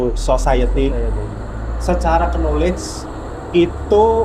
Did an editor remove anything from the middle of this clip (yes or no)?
no